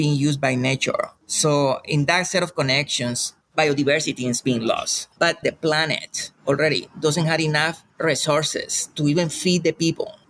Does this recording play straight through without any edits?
no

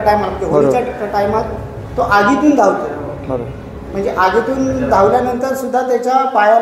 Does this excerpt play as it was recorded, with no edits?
yes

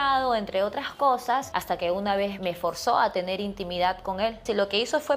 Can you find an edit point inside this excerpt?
yes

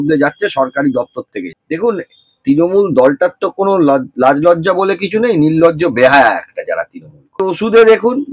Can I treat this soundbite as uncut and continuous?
no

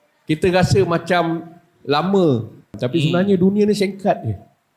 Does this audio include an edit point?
yes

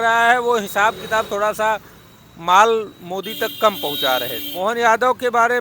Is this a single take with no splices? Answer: no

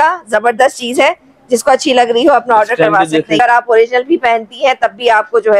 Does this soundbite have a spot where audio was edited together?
yes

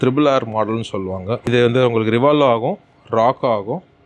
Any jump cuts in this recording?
yes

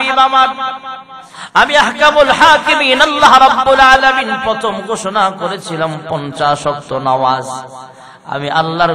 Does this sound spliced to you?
no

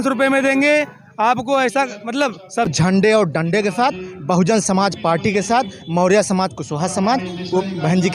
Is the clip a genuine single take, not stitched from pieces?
no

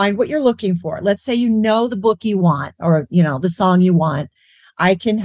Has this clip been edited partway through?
no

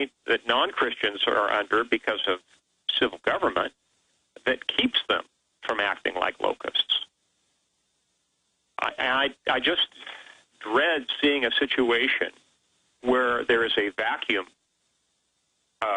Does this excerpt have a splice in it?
no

